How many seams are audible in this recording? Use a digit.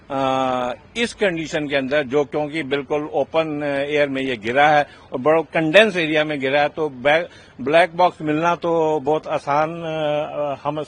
0